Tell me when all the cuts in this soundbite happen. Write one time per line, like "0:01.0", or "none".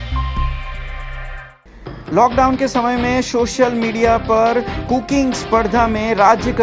0:01.5